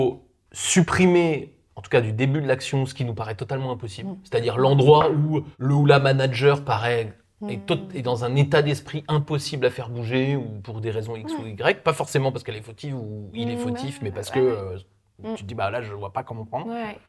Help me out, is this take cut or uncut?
uncut